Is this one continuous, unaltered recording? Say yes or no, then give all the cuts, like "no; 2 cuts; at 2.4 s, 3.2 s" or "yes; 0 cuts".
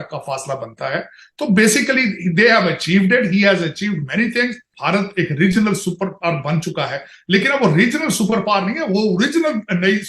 no; 1 cut; at 4.7 s